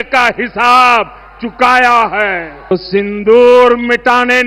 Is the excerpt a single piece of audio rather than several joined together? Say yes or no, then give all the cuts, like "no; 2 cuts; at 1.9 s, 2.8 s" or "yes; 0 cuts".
no; 1 cut; at 2.7 s